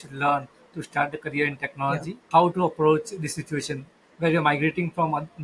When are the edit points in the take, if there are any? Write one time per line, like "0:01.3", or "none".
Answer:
0:02.2